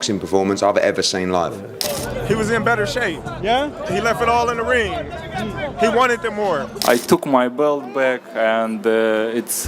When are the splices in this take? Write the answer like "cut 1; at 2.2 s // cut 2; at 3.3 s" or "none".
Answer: cut 1; at 1.8 s // cut 2; at 6.7 s